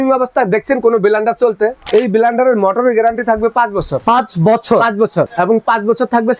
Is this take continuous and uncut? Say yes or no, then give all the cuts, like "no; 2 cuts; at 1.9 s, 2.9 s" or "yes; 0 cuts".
no; 3 cuts; at 1.8 s, 3.9 s, 5.3 s